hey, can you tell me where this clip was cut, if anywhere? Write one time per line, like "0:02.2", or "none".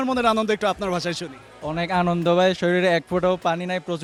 none

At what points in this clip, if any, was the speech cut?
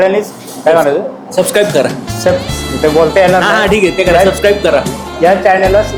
none

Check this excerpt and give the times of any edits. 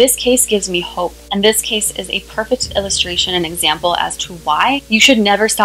0:01.2
0:04.8

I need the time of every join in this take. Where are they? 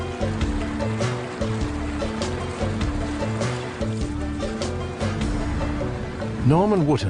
0:02.8

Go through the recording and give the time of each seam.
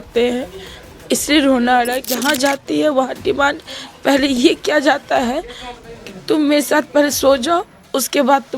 0:02.1

